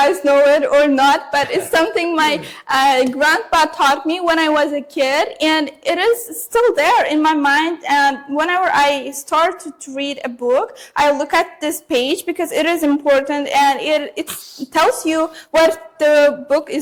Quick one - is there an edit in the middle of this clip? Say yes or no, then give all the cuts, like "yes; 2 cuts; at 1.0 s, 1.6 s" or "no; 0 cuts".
no; 0 cuts